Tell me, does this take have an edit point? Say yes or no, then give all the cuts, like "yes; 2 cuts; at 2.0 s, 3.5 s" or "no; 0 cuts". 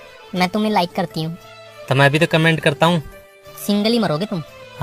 no; 0 cuts